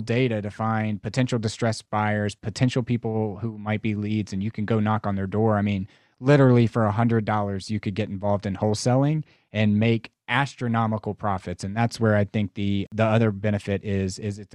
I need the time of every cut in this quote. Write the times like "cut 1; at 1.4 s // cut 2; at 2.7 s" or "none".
cut 1; at 12.9 s